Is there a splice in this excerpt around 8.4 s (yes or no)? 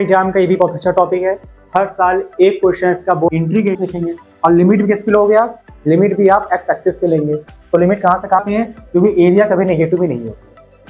yes